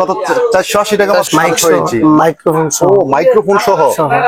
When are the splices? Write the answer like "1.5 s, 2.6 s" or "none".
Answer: 1.3 s